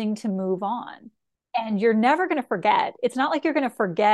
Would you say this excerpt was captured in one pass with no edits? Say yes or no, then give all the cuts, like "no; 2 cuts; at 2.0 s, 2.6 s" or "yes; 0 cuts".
no; 1 cut; at 1.2 s